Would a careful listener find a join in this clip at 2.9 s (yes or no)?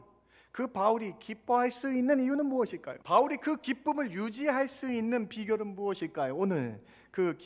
yes